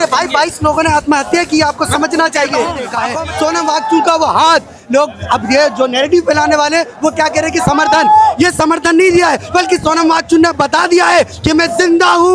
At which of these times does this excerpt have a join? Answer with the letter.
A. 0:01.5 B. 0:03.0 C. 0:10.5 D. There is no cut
B